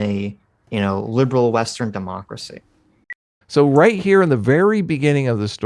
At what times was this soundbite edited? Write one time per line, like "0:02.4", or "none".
0:03.4